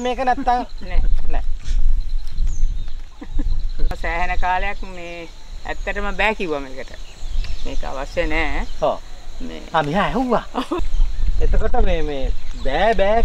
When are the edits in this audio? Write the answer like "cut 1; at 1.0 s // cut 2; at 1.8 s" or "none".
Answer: cut 1; at 3.9 s // cut 2; at 10.8 s